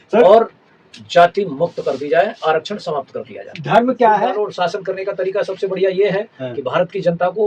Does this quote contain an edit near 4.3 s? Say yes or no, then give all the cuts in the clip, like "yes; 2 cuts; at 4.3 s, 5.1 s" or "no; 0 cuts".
yes; 1 cut; at 4.3 s